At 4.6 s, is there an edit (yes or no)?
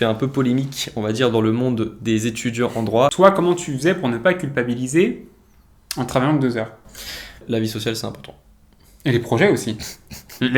no